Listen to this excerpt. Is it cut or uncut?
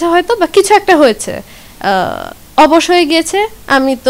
uncut